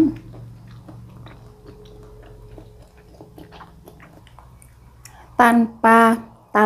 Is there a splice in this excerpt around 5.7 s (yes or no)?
no